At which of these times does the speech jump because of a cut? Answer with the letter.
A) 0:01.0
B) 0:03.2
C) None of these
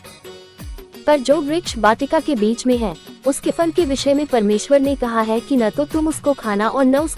A